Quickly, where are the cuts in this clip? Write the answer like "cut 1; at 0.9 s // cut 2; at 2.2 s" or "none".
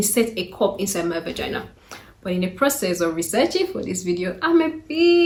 none